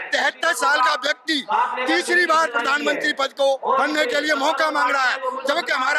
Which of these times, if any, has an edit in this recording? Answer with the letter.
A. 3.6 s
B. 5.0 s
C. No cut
A